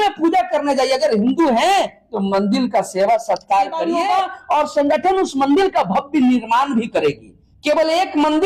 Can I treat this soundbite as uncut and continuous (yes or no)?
no